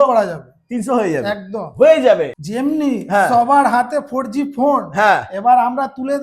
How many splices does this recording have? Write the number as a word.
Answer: one